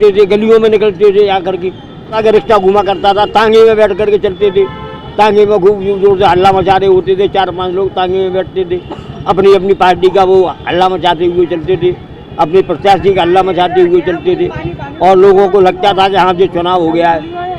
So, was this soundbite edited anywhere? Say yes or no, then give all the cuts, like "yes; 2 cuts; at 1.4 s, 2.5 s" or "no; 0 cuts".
yes; 1 cut; at 2.2 s